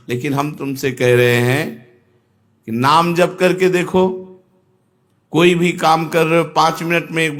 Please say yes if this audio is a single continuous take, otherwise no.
yes